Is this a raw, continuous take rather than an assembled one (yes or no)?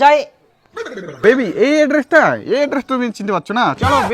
no